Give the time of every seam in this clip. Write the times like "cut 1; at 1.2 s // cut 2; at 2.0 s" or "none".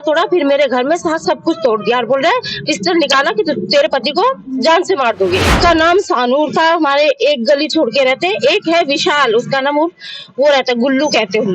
cut 1; at 5.5 s